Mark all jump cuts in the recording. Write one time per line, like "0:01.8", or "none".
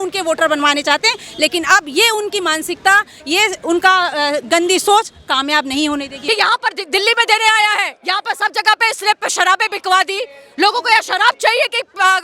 0:06.1